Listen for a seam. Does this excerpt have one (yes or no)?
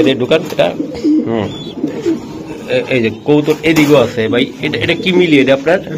no